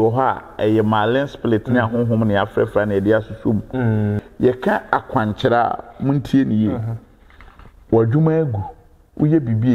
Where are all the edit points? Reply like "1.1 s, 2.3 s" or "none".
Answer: 4.2 s

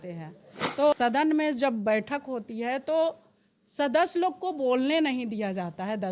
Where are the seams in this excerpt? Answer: 0.9 s

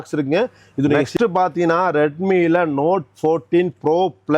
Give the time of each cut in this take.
1.1 s

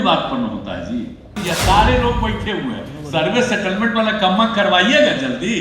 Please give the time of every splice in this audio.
1.4 s

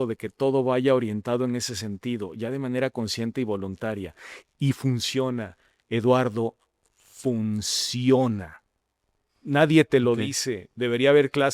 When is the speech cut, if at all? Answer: none

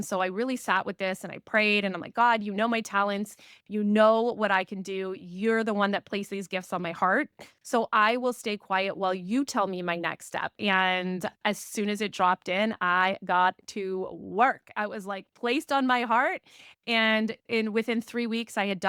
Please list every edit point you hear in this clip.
10.6 s

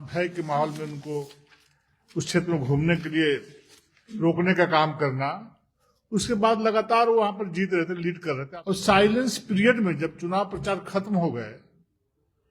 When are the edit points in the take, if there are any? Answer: 8.4 s

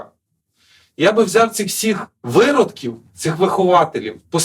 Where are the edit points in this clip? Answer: 2.1 s

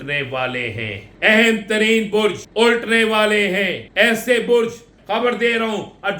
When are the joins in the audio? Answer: 1.0 s, 2.4 s, 3.8 s, 4.9 s

